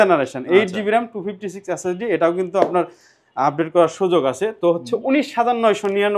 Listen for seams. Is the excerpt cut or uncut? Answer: uncut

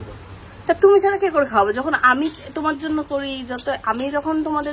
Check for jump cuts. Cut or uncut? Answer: uncut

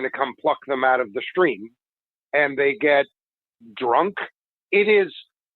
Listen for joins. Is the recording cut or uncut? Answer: cut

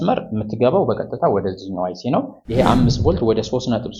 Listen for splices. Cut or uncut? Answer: cut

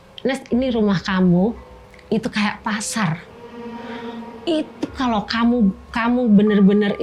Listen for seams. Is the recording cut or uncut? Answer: uncut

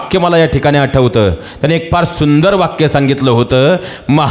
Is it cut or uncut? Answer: uncut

